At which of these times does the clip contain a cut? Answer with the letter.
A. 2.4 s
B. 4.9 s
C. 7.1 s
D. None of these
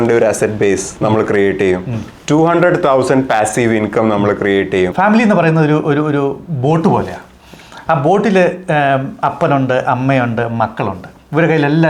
B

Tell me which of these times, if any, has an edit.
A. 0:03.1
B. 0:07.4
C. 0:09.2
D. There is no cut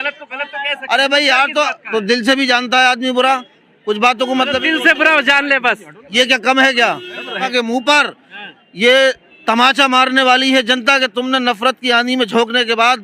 B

